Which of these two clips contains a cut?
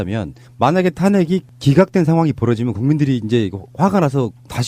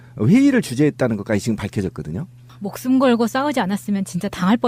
first; 1 cut; at 1.9 s

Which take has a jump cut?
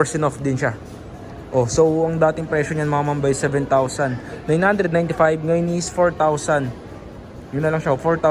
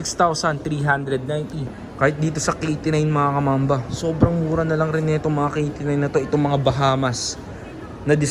second; 1 cut; at 1.8 s

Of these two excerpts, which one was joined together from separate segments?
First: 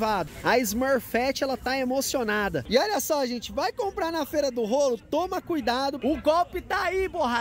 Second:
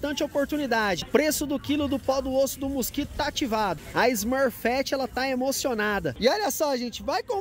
first; 1 cut; at 6.0 s

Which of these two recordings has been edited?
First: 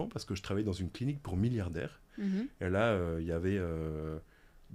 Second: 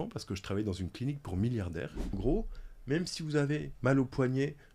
second; 1 cut; at 2.1 s

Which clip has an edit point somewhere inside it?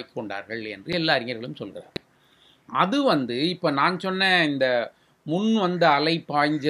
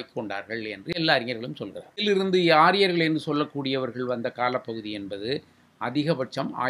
second; 1 cut; at 2.0 s

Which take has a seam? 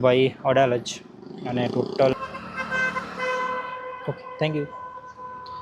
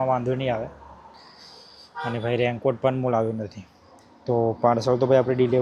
first; 1 cut; at 2.1 s

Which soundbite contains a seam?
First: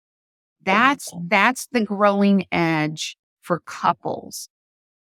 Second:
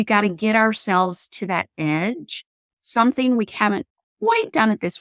second; 1 cut; at 2.6 s

